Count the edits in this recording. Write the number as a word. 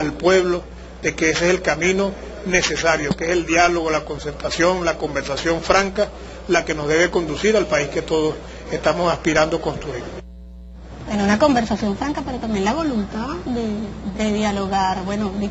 one